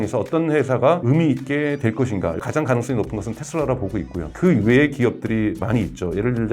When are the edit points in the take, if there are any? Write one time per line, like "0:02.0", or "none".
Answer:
0:01.0
0:02.4